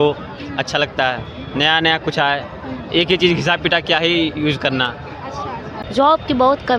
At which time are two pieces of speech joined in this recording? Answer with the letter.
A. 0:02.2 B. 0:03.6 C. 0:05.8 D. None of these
C